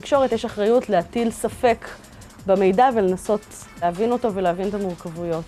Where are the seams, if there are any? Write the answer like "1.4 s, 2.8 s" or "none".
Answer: 3.8 s